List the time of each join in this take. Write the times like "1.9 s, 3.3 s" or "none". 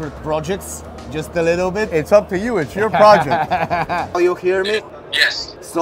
4.2 s